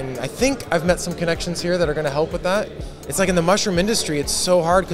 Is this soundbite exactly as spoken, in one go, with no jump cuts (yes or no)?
no